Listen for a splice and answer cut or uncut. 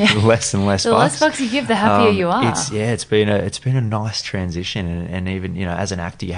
uncut